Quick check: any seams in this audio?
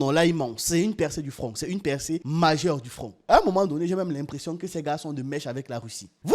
yes; 1 cut; at 3.2 s

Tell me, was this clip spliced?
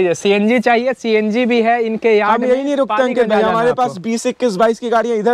no; 0 cuts

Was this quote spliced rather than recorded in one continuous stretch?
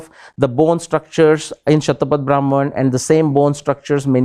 no; 0 cuts

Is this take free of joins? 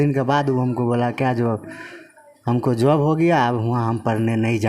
yes; 0 cuts

